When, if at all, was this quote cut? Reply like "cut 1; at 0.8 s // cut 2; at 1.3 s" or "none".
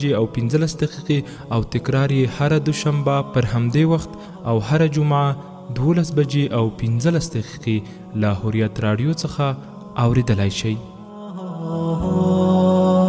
none